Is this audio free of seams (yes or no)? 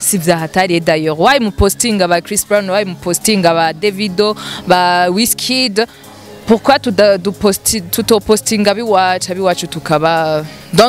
yes